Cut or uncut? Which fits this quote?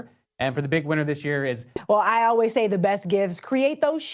cut